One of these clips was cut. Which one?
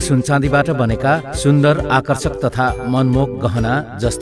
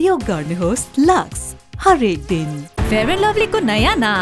second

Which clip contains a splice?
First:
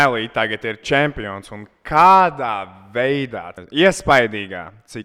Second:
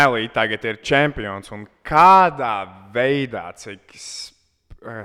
first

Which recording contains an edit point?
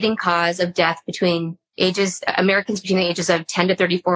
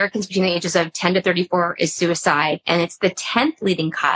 first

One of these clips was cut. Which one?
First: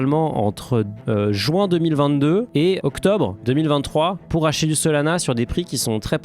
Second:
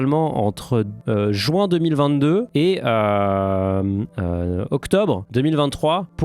first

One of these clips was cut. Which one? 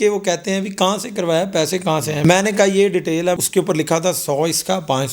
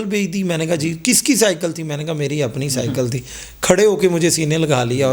first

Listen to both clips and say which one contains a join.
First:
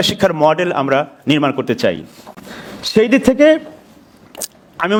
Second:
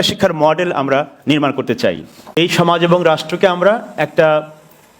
second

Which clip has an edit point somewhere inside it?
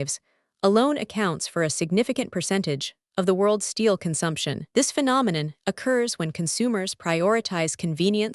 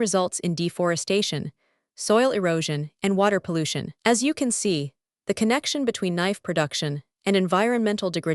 first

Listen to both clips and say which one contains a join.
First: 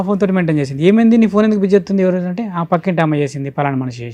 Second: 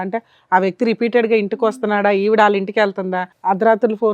second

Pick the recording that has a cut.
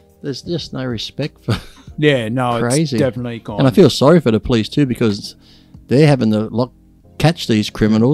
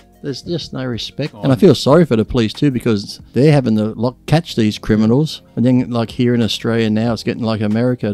second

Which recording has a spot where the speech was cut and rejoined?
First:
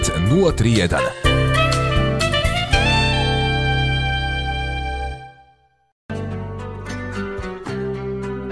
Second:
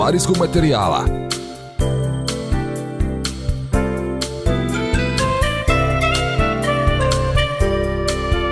first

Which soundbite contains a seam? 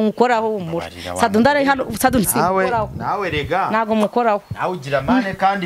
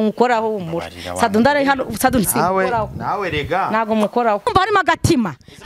second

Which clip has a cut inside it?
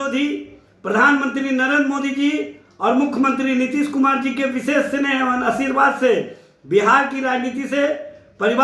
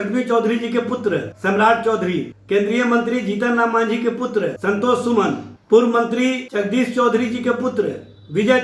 second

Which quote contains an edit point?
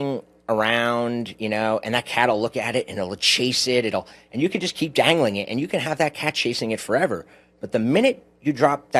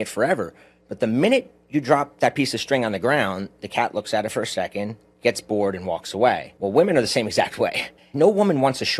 second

